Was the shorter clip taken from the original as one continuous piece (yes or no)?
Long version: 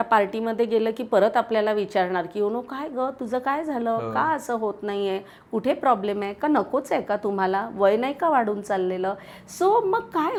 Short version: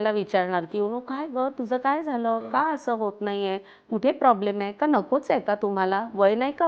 yes